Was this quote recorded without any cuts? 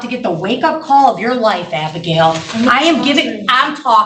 yes; 0 cuts

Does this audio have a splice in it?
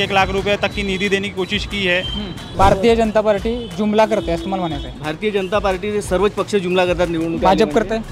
yes; 1 cut; at 2.5 s

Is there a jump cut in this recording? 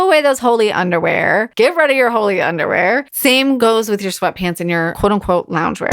yes; 3 cuts; at 1.5 s, 3.6 s, 4.9 s

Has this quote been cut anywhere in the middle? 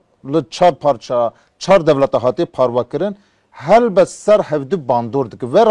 no; 0 cuts

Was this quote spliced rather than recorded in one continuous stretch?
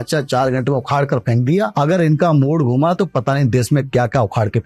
yes; 1 cut; at 1.7 s

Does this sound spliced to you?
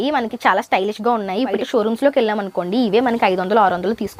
yes; 1 cut; at 1.6 s

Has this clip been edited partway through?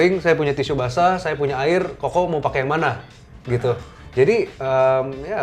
yes; 1 cut; at 4.0 s

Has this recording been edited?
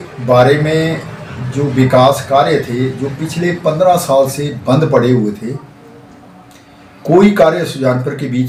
no; 0 cuts

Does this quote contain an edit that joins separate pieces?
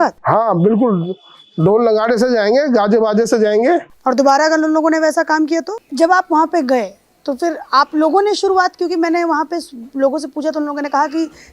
yes; 2 cuts; at 3.9 s, 5.8 s

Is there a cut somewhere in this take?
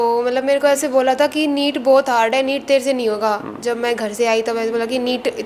no; 0 cuts

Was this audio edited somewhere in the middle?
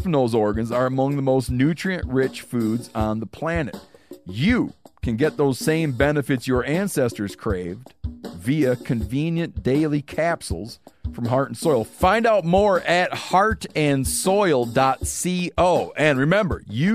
no; 0 cuts

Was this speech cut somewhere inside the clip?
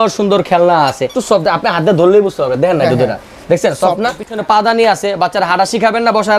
yes; 2 cuts; at 1.1 s, 4.3 s

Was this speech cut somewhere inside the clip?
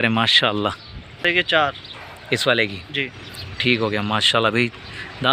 yes; 1 cut; at 1.2 s

